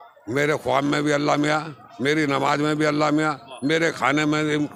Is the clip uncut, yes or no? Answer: yes